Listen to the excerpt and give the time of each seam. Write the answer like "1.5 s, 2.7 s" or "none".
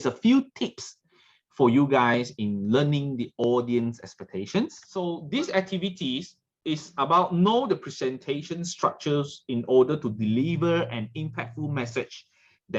4.8 s